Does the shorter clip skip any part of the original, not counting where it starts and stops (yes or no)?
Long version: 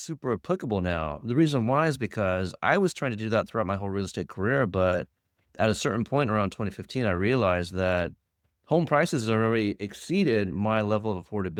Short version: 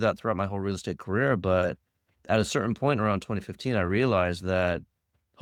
no